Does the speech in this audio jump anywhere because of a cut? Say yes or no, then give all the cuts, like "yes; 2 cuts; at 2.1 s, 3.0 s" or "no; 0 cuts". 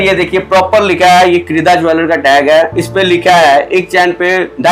no; 0 cuts